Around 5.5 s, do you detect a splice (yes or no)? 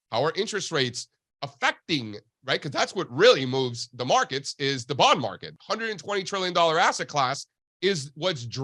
yes